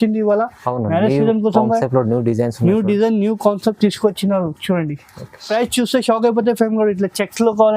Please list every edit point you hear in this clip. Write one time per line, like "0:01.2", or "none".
0:05.5